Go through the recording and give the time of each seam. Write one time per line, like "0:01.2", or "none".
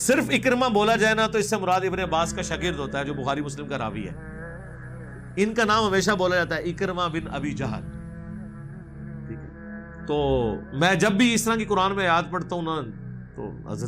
0:04.1
0:05.3
0:07.7
0:10.1